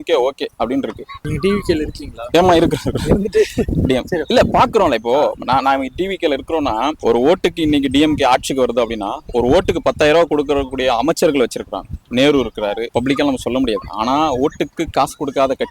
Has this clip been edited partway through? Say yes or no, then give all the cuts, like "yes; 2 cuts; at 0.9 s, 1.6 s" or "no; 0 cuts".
yes; 3 cuts; at 1.3 s, 7.0 s, 12.9 s